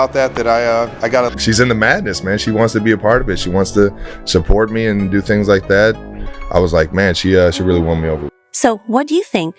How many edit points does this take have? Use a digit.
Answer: 0